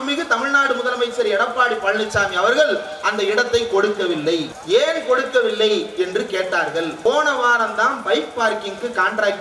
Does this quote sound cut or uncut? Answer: cut